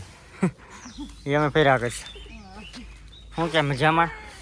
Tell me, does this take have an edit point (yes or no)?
no